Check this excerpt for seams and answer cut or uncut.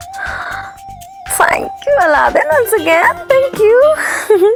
uncut